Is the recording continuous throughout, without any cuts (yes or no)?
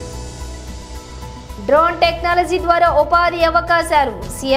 yes